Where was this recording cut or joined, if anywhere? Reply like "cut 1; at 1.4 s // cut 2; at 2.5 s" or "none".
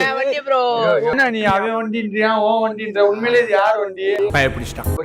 cut 1; at 1.1 s